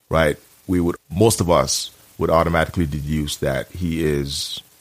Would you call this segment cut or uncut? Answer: cut